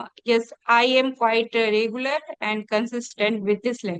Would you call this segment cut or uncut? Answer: uncut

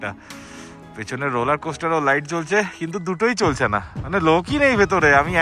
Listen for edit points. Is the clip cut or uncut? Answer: uncut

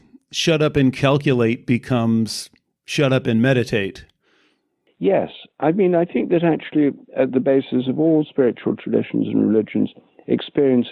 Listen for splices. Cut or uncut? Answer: cut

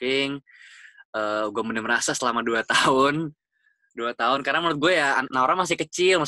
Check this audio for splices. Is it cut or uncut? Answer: uncut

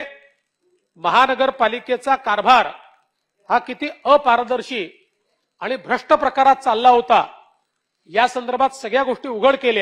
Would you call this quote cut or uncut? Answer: uncut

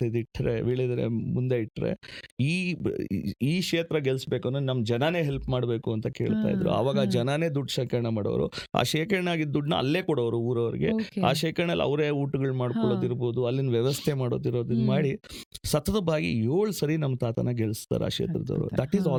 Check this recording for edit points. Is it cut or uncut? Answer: uncut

